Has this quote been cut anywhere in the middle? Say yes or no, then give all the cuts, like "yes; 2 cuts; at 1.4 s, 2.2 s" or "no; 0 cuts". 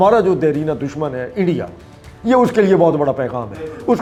no; 0 cuts